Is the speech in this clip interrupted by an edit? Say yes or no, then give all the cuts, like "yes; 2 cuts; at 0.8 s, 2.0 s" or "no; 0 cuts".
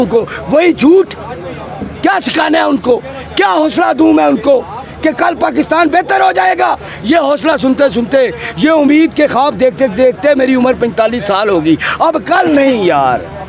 no; 0 cuts